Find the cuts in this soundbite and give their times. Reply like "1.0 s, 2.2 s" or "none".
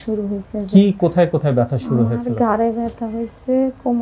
none